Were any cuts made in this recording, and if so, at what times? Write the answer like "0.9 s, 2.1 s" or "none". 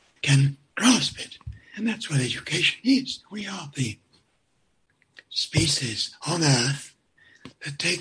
none